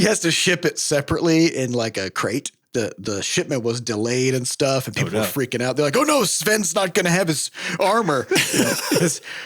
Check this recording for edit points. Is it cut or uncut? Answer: cut